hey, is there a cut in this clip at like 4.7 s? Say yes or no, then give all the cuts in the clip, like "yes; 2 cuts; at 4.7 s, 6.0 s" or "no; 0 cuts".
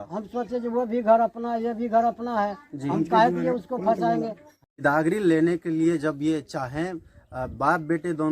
yes; 1 cut; at 4.7 s